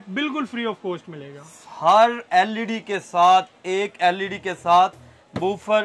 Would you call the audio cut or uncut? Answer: uncut